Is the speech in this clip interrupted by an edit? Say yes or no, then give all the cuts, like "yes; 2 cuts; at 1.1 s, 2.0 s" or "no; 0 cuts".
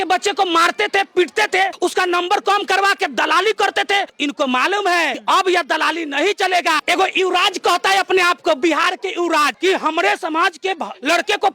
yes; 4 cuts; at 4.1 s, 5.2 s, 6.8 s, 9.5 s